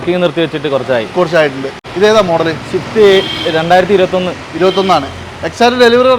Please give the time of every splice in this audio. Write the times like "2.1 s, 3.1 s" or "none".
1.8 s